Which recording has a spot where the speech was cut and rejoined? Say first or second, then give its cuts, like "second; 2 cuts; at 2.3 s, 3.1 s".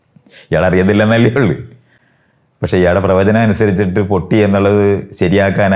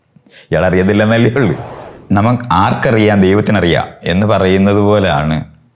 second; 1 cut; at 2.0 s